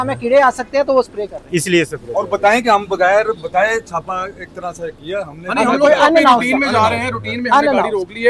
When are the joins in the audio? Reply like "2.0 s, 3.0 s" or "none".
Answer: none

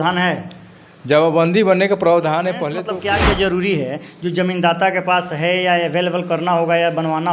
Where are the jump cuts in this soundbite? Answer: 2.8 s

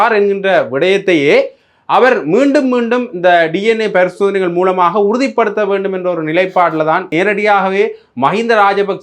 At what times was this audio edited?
7.1 s

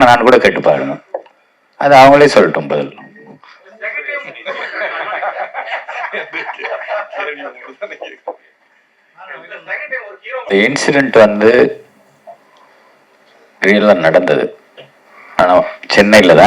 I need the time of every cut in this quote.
10.5 s

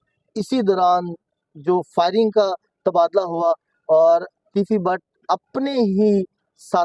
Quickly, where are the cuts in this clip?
none

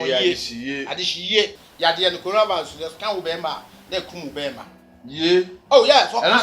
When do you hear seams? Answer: 1.6 s

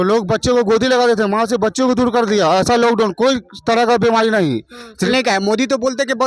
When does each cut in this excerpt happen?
5.1 s

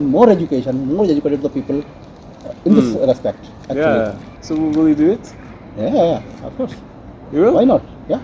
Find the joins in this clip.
4.3 s

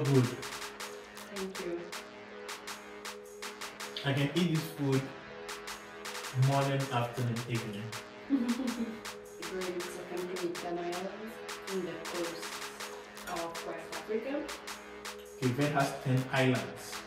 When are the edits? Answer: 1.9 s, 3.4 s, 9.4 s

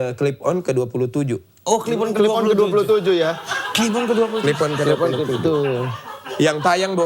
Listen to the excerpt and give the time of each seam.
none

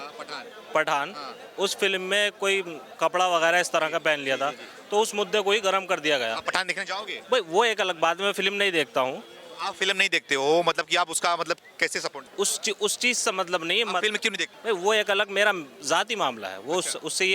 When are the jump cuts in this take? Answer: 7.1 s, 12.2 s, 14.5 s

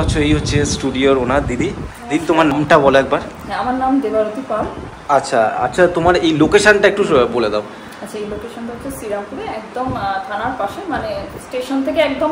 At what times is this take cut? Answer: 2.5 s

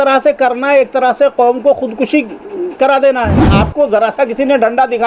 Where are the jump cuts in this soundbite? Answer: 3.5 s

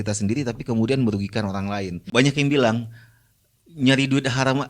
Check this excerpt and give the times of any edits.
1.9 s

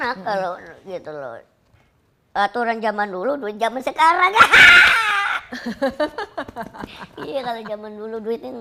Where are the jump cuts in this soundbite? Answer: none

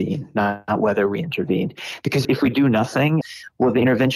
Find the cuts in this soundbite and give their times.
none

